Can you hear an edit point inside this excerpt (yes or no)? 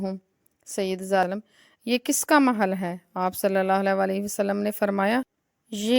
yes